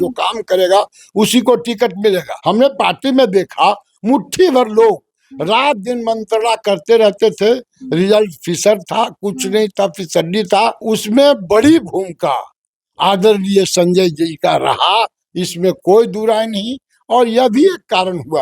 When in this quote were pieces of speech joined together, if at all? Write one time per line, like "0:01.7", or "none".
0:02.3
0:10.8